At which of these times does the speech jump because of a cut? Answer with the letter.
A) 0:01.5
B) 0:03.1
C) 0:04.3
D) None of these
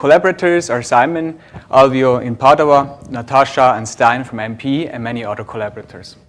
A